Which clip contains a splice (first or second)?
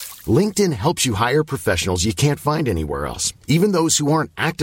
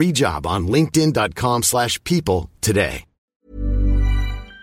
second